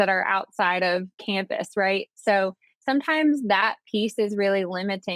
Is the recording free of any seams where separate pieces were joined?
no; 1 cut; at 1.1 s

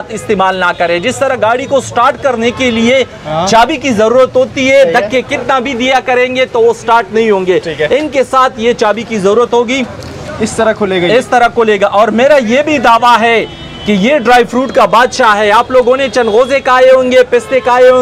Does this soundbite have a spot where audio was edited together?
no; 0 cuts

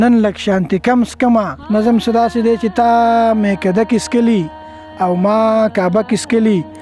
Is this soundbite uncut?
no; 1 cut; at 1.6 s

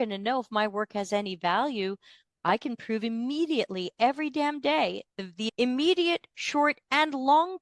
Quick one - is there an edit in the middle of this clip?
yes; 1 cut; at 5.4 s

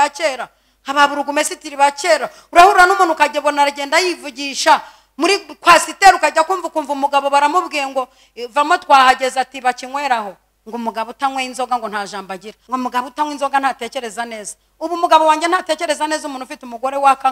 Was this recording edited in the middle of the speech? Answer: yes; 2 cuts; at 10.5 s, 12.5 s

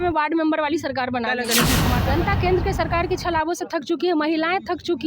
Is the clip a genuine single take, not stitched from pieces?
no; 1 cut; at 1.9 s

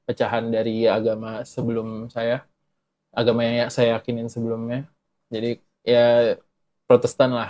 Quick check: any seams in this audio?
no; 0 cuts

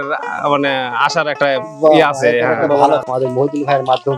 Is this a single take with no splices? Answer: no; 1 cut; at 3.0 s

